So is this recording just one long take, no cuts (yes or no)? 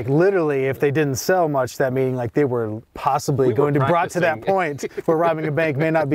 no